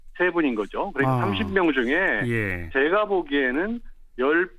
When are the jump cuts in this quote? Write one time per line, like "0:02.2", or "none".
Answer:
0:03.3